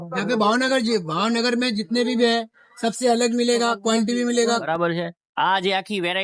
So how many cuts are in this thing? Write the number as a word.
one